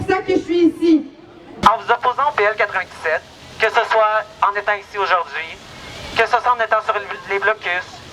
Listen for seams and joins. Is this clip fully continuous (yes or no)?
no